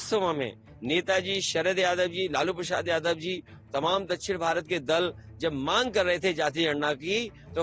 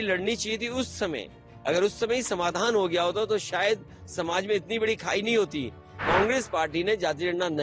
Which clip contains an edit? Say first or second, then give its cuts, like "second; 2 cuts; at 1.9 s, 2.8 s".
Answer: second; 1 cut; at 6.0 s